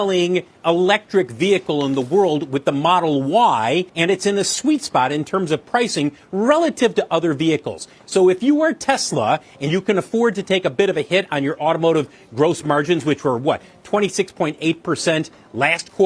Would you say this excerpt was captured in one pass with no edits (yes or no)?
no